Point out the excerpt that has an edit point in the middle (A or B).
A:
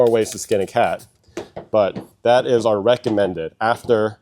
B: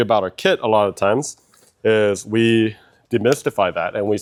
A